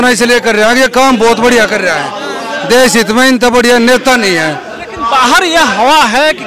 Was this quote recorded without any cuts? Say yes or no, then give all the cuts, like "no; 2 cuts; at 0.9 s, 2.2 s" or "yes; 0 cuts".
yes; 0 cuts